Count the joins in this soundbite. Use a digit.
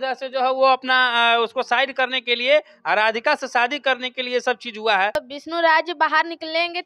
1